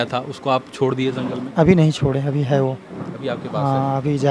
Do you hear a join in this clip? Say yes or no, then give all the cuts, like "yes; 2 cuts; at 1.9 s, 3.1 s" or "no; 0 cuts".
no; 0 cuts